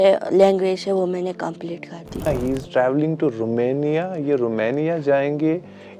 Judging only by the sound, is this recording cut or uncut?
cut